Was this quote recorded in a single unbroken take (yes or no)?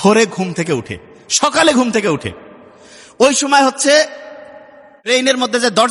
yes